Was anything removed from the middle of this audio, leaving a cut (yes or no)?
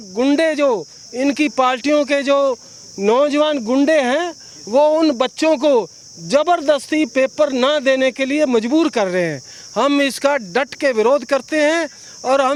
no